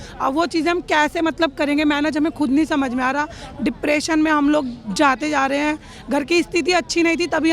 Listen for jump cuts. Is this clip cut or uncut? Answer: uncut